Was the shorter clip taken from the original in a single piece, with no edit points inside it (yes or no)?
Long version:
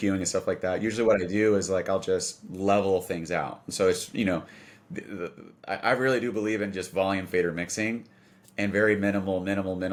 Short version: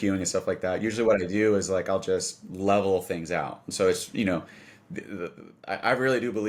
yes